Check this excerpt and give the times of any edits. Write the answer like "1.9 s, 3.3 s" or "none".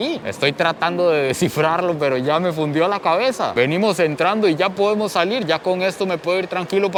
none